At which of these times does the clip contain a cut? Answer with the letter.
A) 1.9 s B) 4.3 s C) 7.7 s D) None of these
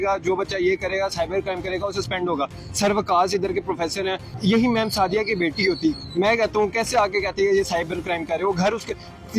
B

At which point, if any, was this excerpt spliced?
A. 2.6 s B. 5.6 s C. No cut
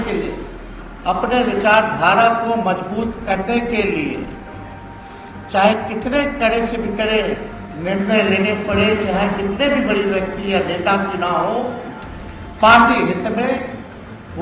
C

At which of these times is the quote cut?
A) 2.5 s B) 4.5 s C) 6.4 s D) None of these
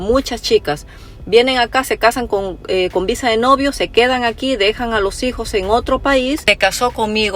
C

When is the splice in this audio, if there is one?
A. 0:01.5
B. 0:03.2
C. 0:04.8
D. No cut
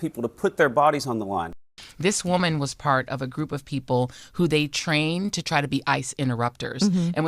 A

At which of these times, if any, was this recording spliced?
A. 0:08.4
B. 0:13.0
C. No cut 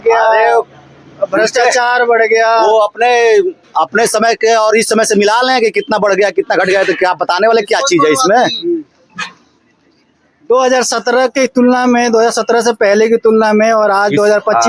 A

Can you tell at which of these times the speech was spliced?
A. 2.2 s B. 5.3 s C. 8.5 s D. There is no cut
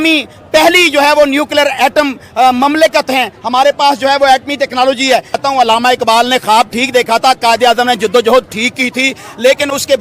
B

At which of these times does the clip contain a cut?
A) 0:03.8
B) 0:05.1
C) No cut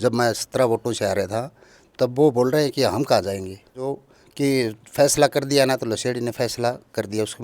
A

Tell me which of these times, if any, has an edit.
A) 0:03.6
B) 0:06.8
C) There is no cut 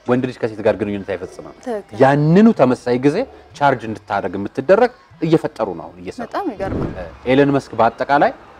B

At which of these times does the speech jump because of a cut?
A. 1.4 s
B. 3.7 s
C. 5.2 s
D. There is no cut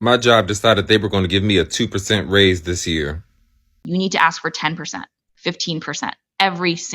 B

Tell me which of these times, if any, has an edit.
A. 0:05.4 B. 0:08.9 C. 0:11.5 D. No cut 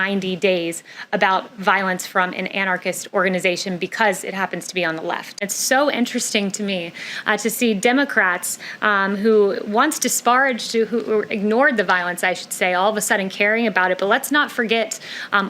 A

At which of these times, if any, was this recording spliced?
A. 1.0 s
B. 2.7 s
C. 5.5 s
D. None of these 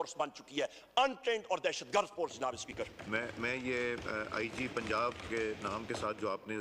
D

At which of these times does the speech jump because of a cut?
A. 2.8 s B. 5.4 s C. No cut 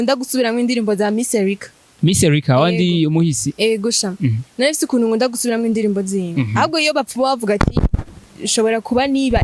C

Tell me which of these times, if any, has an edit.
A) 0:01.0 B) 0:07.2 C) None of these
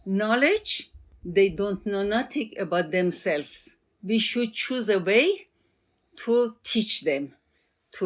C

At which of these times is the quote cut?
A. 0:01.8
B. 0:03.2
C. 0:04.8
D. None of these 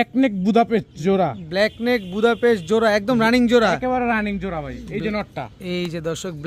D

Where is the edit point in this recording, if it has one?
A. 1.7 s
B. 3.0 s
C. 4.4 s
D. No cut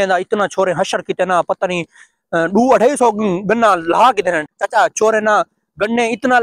C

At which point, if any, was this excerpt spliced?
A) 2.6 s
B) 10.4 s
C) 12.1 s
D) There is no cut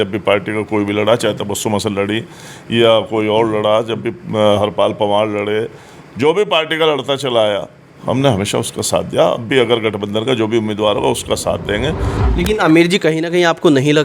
C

